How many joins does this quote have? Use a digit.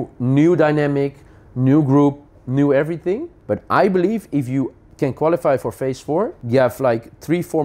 3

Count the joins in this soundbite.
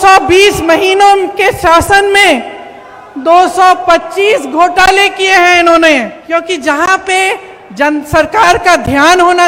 1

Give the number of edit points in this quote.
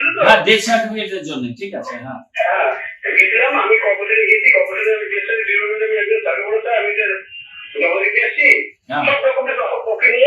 0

